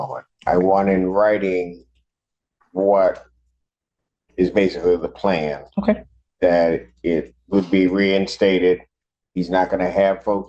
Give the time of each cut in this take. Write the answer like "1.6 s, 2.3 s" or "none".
none